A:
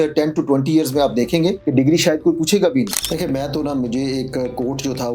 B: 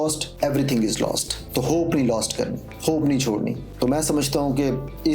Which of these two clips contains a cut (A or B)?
A